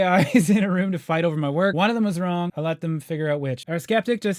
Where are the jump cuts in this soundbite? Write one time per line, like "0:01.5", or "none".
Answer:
0:01.7
0:02.5
0:03.6